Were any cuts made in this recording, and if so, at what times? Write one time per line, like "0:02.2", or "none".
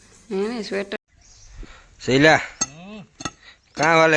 0:01.0